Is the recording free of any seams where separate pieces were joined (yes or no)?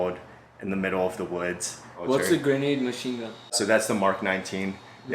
no